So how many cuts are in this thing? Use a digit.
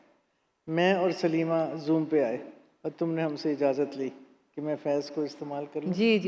0